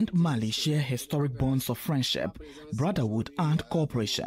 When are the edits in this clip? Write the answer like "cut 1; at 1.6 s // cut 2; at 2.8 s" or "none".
none